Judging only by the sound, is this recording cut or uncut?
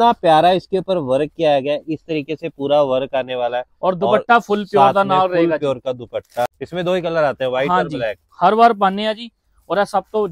cut